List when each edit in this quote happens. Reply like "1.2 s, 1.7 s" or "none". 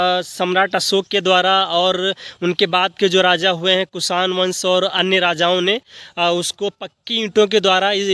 none